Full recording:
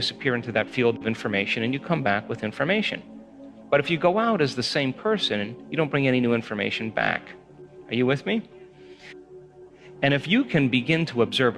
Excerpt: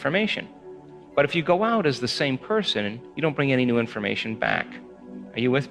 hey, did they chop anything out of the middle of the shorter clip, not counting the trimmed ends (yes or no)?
no